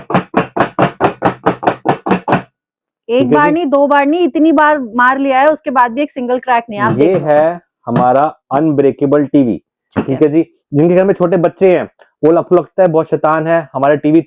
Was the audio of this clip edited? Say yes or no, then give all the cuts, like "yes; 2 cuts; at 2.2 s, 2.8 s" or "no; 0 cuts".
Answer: no; 0 cuts